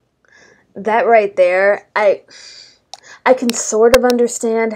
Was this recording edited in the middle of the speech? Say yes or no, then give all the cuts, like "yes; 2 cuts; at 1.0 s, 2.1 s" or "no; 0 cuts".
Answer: yes; 1 cut; at 1.8 s